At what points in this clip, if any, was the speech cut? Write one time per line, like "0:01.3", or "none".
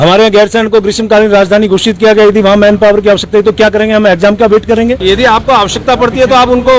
0:05.0